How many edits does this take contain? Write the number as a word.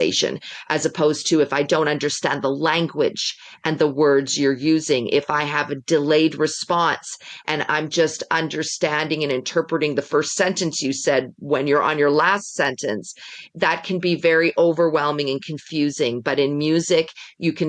zero